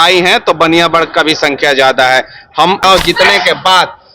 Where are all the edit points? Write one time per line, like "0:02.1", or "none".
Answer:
0:02.8